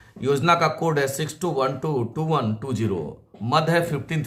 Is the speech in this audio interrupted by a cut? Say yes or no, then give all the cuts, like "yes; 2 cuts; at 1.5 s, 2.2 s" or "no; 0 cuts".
no; 0 cuts